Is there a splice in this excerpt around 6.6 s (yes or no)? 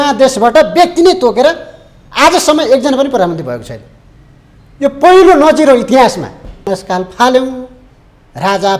yes